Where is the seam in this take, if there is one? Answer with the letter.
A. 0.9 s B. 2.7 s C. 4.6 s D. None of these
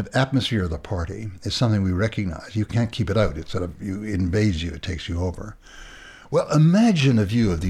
B